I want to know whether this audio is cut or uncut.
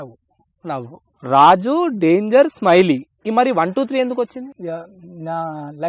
cut